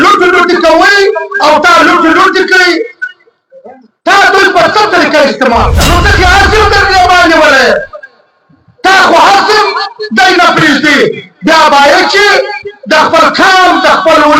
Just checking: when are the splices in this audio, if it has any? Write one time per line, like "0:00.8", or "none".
0:05.8